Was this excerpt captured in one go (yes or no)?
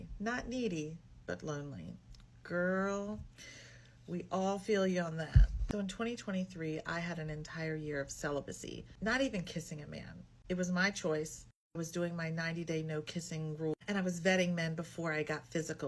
yes